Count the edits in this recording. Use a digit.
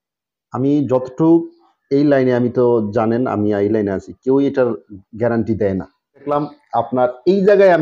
1